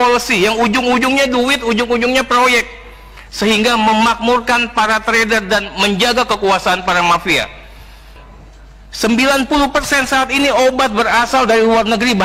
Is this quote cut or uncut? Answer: cut